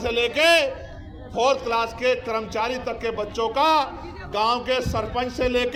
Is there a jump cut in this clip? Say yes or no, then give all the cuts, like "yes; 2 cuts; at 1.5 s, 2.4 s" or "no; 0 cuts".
no; 0 cuts